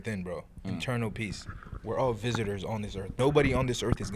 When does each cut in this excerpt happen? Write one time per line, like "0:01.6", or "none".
0:03.1